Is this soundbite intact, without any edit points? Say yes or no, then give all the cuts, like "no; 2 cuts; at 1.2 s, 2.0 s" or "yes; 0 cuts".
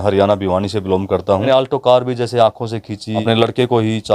no; 2 cuts; at 1.5 s, 3.2 s